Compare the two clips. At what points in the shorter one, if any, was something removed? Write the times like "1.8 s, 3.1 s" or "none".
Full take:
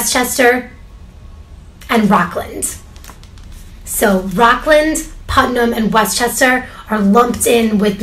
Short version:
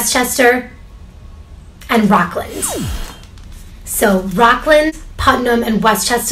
5.1 s